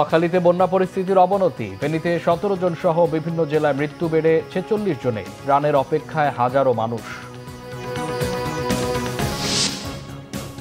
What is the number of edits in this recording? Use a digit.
1